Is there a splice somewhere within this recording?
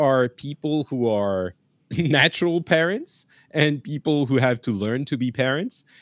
no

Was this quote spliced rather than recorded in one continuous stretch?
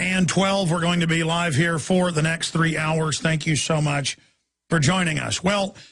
no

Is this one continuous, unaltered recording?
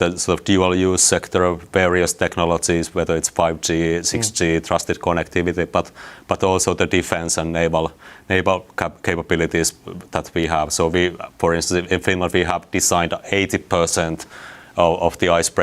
yes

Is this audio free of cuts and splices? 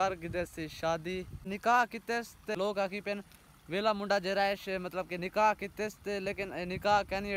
no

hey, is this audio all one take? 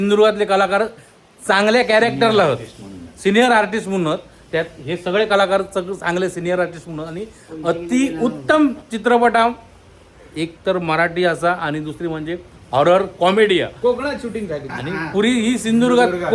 yes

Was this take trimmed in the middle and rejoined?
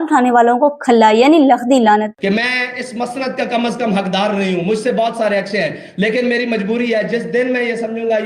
yes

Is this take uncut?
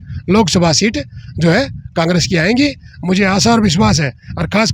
yes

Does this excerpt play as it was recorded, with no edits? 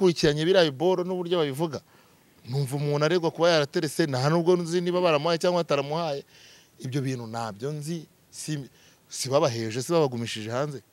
yes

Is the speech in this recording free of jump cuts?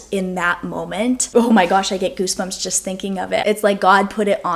no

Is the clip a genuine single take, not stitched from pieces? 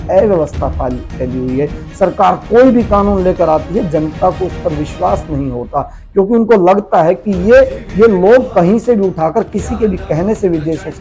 yes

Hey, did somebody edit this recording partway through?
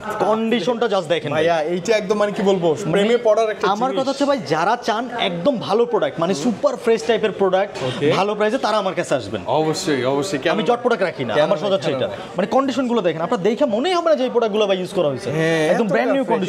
no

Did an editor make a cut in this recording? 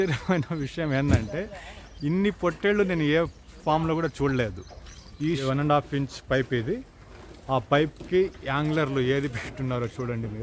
yes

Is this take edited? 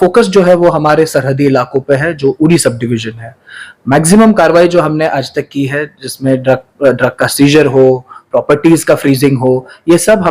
no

